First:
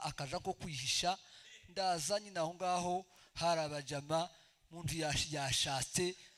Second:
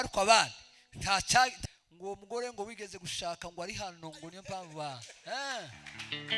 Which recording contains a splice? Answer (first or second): second